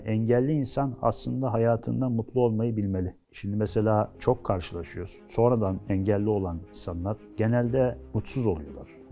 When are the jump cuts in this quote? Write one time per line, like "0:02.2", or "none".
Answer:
none

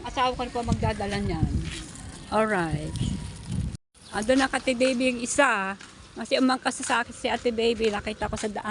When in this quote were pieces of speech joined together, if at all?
none

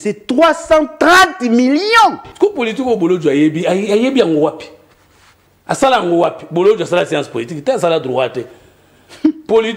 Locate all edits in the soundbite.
0:02.2

